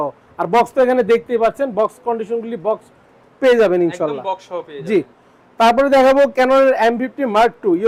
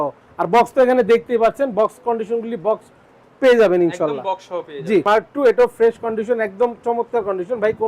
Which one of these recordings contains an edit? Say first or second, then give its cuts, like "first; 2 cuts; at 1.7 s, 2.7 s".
second; 1 cut; at 5.0 s